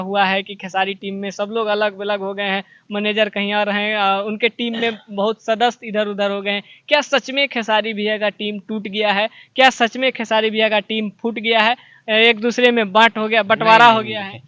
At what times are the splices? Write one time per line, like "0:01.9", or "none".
none

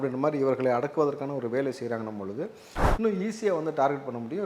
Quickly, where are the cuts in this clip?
0:02.7

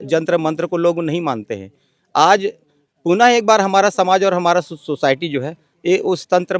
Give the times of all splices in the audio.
none

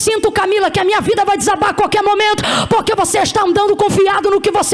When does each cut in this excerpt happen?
none

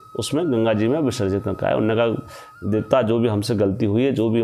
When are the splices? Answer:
none

